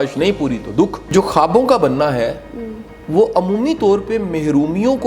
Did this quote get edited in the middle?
yes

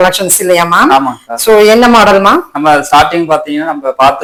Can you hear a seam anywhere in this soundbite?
no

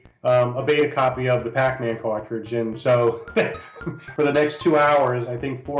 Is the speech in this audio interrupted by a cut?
yes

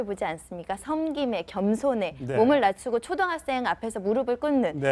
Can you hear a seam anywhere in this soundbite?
yes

